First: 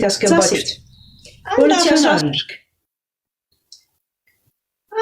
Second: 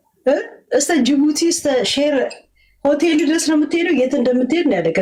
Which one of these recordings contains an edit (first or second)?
first